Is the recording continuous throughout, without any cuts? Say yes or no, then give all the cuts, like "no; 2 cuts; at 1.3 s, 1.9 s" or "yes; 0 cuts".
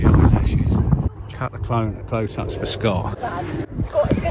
no; 2 cuts; at 1.1 s, 3.1 s